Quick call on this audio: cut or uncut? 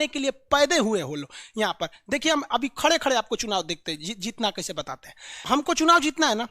cut